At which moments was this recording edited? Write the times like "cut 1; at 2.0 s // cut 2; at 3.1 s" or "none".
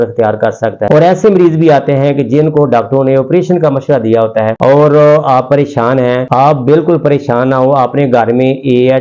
cut 1; at 0.9 s // cut 2; at 4.5 s